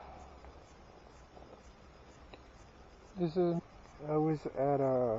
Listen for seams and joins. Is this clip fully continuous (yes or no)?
yes